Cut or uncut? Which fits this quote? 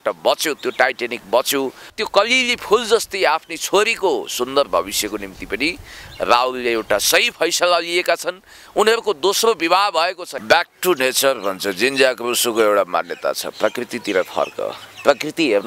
cut